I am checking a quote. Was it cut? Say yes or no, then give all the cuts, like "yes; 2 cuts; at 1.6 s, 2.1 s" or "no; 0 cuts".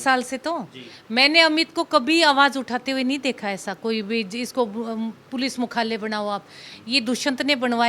no; 0 cuts